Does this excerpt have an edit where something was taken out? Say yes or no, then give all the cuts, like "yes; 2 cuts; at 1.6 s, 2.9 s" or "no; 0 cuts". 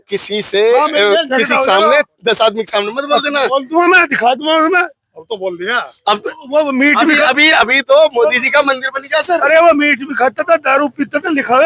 no; 0 cuts